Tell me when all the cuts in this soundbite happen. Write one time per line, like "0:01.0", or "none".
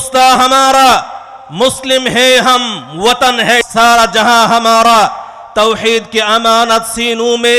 0:03.7